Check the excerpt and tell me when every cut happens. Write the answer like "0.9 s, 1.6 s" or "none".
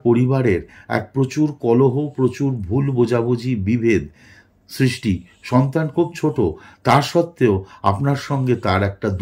none